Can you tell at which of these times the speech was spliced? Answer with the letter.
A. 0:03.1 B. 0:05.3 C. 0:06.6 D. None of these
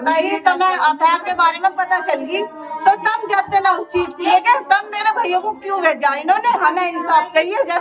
C